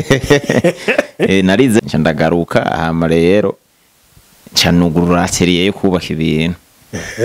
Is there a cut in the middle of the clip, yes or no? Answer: yes